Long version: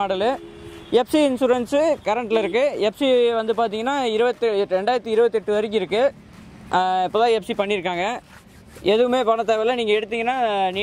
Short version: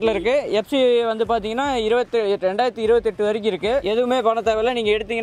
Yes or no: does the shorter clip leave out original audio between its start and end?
yes